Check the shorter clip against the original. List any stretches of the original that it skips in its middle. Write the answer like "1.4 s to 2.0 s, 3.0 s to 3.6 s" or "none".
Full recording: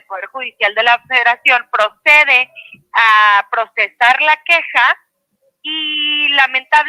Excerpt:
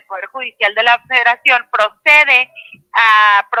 none